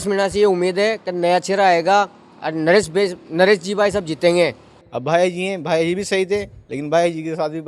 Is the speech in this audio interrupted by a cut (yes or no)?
yes